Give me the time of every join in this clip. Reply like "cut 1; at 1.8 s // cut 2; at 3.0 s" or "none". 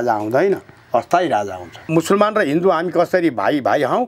cut 1; at 1.9 s